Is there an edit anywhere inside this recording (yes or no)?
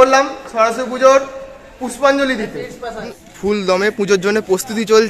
yes